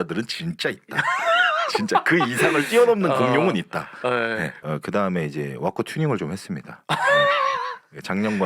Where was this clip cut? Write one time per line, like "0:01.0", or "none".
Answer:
0:04.6

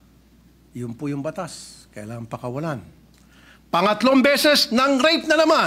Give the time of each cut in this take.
none

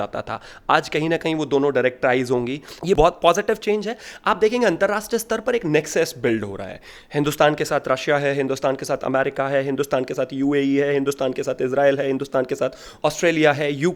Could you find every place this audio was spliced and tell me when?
0:02.7

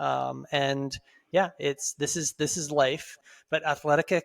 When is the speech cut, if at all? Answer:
0:03.2

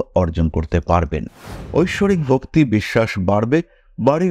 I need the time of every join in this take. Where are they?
0:01.5

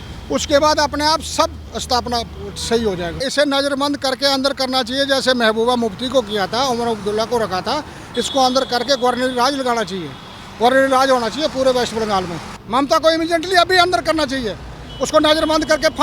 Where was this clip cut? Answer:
0:01.7
0:03.3
0:12.6

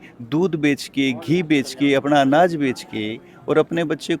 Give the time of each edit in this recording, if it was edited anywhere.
none

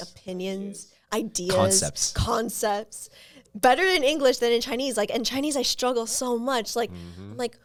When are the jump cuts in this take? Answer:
none

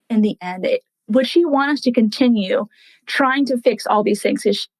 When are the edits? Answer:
0:01.1

